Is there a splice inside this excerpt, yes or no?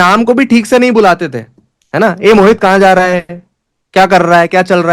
no